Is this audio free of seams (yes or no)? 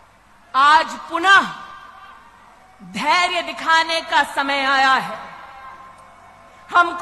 yes